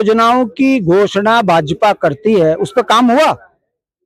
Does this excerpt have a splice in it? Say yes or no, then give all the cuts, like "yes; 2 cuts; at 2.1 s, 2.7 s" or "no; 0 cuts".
no; 0 cuts